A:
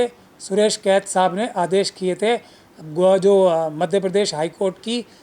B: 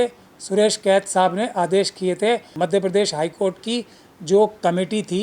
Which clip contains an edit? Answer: B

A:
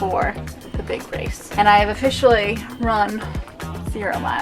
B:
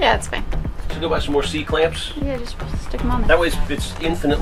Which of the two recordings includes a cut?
A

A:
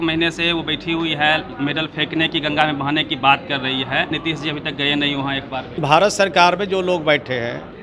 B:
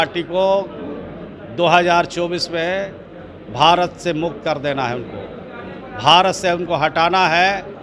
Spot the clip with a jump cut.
A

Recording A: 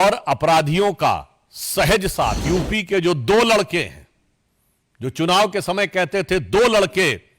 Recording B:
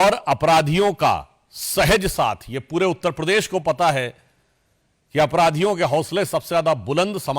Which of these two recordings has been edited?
A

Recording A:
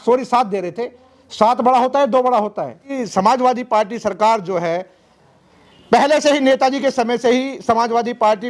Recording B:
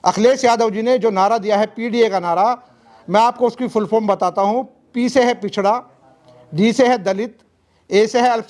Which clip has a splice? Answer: A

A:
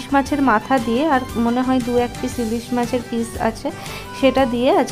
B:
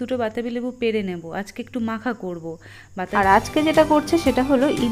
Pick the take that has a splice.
B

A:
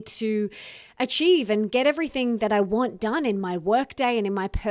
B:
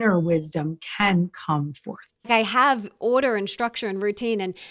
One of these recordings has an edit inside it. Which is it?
B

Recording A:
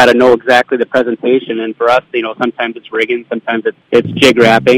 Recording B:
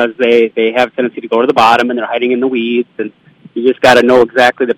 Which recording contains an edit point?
A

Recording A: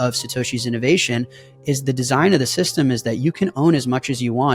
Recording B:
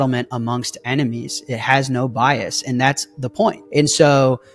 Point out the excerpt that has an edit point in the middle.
B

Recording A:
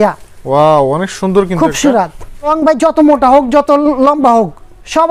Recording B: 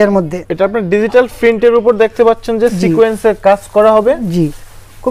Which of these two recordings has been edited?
A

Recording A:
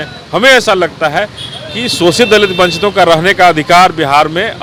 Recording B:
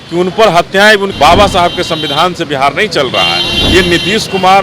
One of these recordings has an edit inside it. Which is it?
B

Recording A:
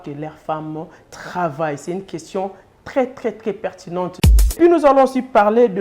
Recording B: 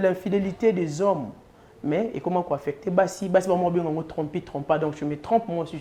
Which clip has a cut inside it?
A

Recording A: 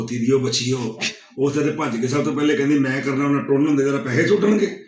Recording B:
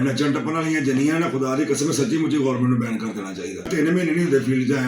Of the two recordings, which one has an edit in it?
B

